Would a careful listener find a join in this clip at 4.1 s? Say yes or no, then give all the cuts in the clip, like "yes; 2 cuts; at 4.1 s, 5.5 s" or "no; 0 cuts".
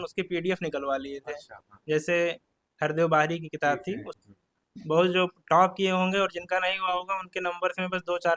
yes; 1 cut; at 4.1 s